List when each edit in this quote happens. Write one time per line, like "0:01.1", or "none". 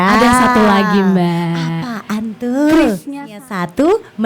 0:03.2